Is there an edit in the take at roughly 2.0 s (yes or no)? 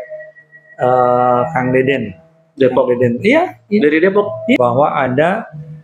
no